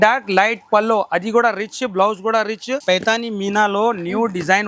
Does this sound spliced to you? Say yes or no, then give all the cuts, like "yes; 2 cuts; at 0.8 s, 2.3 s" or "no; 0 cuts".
yes; 1 cut; at 2.7 s